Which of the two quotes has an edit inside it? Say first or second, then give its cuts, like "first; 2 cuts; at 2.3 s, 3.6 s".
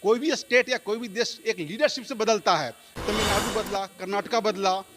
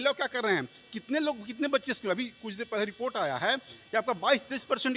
first; 1 cut; at 2.8 s